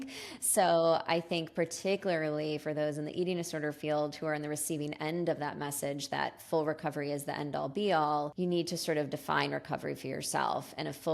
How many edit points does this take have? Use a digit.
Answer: 1